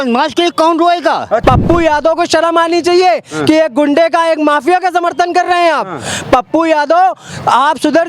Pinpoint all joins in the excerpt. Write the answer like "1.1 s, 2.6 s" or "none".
1.4 s